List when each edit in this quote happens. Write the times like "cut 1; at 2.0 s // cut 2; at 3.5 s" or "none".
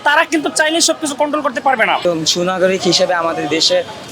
cut 1; at 2.0 s